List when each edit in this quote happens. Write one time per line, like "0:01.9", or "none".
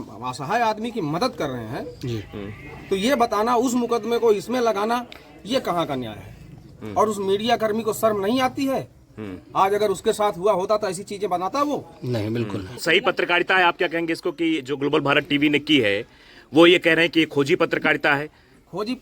0:12.8